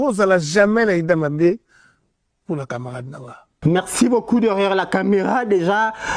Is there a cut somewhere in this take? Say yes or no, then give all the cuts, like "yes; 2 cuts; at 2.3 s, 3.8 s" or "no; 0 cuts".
no; 0 cuts